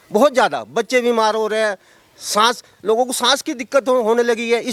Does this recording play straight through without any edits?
yes; 0 cuts

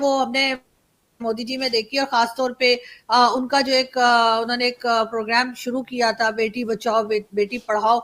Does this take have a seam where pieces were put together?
no; 0 cuts

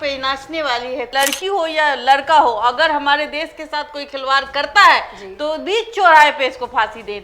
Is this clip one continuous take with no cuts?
no; 1 cut; at 1.1 s

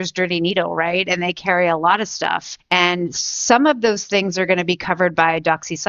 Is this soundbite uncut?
no; 1 cut; at 2.5 s

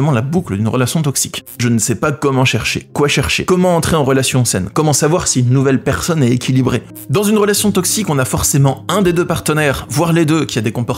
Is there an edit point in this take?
yes; 2 cuts; at 1.6 s, 7.0 s

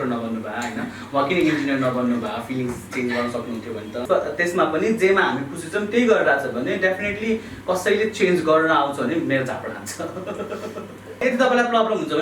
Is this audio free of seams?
no; 2 cuts; at 4.0 s, 11.2 s

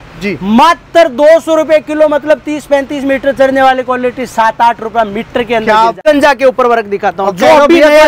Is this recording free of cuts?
no; 1 cut; at 6.0 s

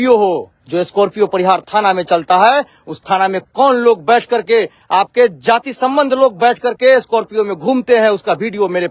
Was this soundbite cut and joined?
no; 0 cuts

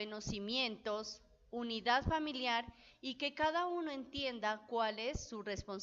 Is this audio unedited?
no; 1 cut; at 4.8 s

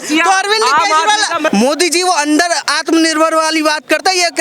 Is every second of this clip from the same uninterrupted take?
no; 1 cut; at 1.5 s

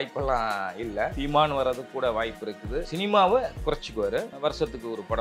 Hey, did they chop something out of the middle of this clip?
yes; 3 cuts; at 1.2 s, 2.9 s, 4.3 s

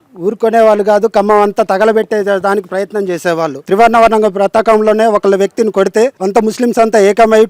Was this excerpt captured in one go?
no; 2 cuts; at 3.6 s, 6.2 s

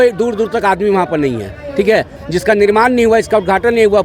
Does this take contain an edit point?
no; 0 cuts

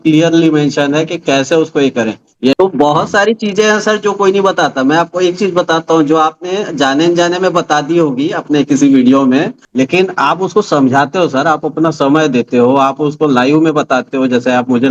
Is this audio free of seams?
no; 2 cuts; at 2.5 s, 9.6 s

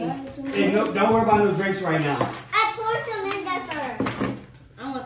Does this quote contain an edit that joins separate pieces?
no; 0 cuts

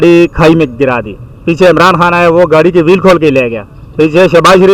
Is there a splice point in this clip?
no; 0 cuts

